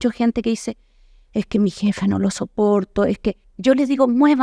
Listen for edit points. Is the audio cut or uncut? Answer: cut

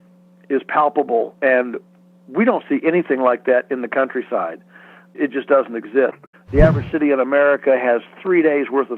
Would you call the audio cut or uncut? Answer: cut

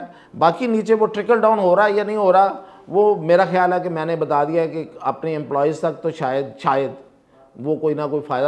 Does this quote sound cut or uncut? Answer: uncut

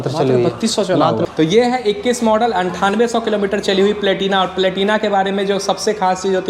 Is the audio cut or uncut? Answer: cut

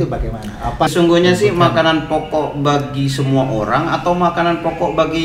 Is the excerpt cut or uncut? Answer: cut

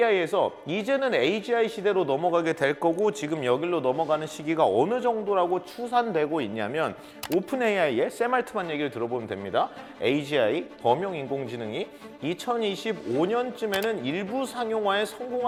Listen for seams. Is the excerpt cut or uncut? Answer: uncut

